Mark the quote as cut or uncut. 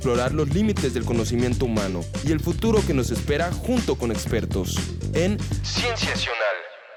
uncut